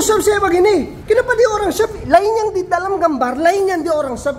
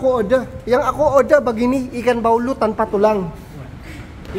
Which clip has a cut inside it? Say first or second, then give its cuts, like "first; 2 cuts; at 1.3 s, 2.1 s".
first; 1 cut; at 0.9 s